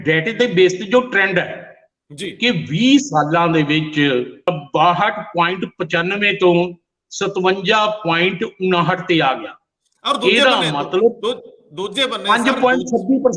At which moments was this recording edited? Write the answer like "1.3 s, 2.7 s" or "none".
4.5 s